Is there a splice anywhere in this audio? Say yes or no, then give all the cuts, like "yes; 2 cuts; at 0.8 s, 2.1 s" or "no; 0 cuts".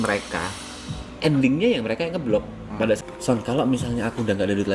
yes; 1 cut; at 3.0 s